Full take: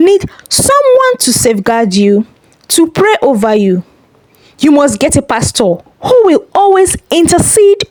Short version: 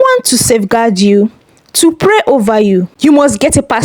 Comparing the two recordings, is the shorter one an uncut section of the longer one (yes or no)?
no